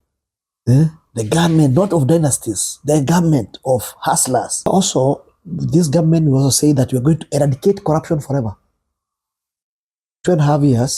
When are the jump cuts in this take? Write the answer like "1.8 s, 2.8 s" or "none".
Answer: 4.6 s